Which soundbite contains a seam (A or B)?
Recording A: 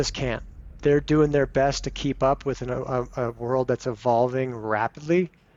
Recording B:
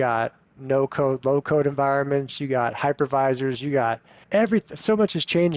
B